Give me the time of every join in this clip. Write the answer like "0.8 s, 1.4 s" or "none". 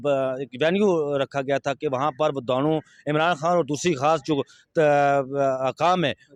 none

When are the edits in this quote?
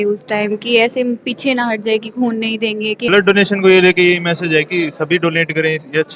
3.0 s

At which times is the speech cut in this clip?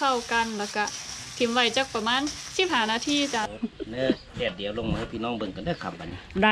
3.5 s

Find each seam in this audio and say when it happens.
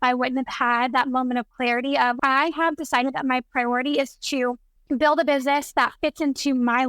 2.2 s, 4.7 s

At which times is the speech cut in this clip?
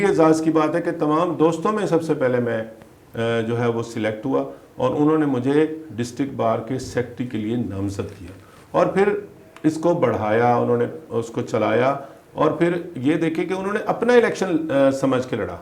none

